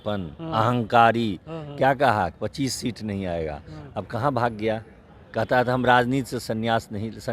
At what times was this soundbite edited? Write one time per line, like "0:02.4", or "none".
none